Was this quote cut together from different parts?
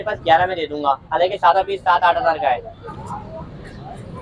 yes; 1 cut; at 2.8 s

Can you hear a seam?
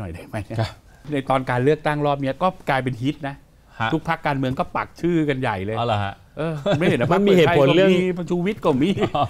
yes; 1 cut; at 1.0 s

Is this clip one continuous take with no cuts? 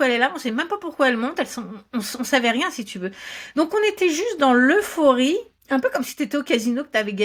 yes; 0 cuts

